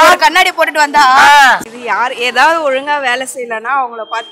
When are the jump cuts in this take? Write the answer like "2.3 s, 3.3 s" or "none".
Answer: 1.6 s

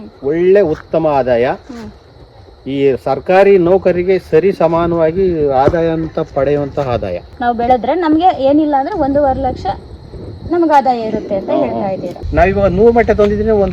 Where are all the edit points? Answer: 7.3 s, 12.1 s

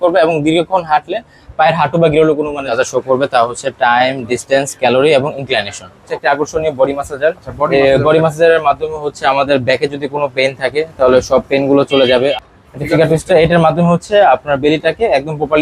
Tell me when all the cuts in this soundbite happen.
2.7 s, 6.1 s, 12.3 s

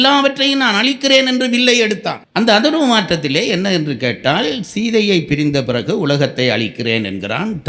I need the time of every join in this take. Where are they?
2.2 s

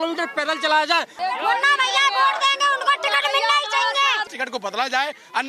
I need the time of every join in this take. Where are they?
1.1 s, 4.3 s

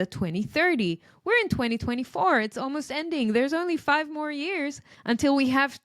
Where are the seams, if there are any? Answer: 4.9 s

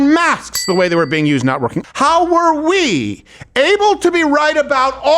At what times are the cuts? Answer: 1.8 s

